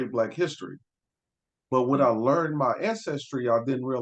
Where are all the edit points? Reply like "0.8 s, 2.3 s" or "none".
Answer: none

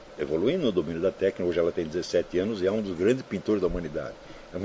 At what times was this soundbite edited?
none

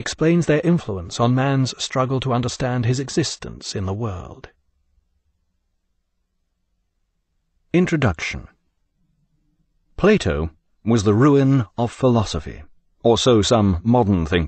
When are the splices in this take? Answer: none

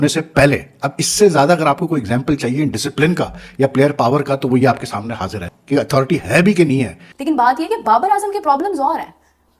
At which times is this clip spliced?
7.1 s

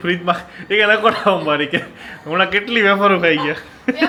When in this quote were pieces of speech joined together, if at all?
none

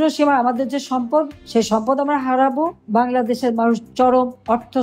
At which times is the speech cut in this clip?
2.8 s

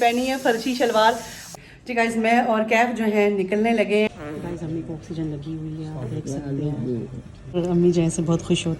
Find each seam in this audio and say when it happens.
1.4 s, 4.1 s, 7.5 s

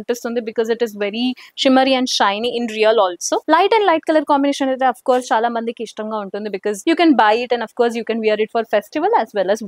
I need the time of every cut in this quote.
3.4 s, 6.8 s

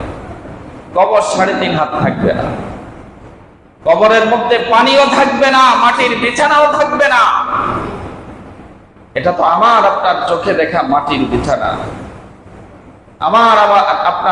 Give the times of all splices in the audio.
none

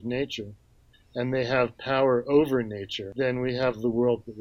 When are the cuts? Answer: 3.1 s

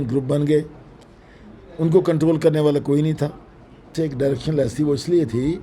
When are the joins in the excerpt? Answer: 3.9 s

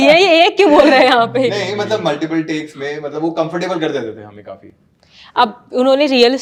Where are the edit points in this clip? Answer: none

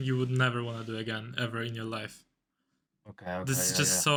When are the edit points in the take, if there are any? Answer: none

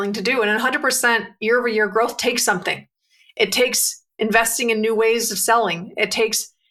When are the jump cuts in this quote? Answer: none

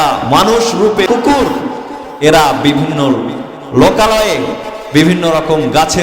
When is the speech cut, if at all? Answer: 1.1 s

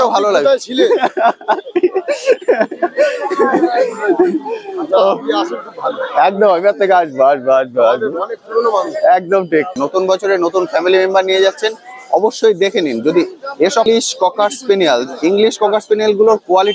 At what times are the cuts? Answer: 9.8 s, 13.9 s

